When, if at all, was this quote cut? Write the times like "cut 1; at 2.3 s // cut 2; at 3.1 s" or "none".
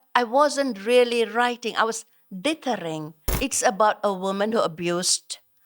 cut 1; at 3.2 s